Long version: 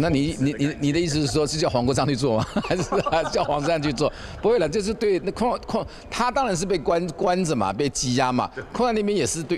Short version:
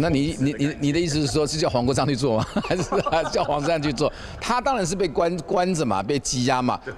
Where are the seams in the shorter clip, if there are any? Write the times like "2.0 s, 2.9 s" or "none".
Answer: 4.3 s